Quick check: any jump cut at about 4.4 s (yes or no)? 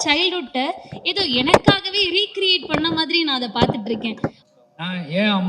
yes